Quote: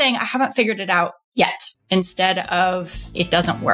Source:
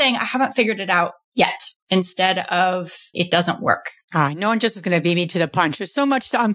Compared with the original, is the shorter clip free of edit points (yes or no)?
yes